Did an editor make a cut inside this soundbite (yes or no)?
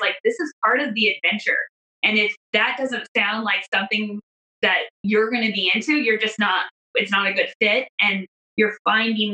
yes